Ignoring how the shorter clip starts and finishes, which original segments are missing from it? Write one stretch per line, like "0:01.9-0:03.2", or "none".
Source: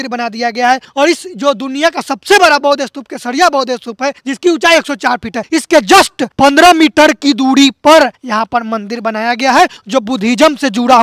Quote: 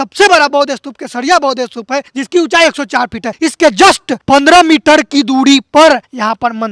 none